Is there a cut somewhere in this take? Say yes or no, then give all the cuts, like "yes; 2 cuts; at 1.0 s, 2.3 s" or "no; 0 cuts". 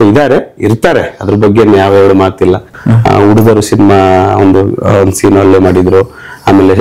yes; 1 cut; at 2.7 s